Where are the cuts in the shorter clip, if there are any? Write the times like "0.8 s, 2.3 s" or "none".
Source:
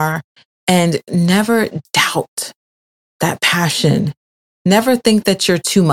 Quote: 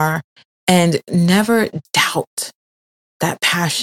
none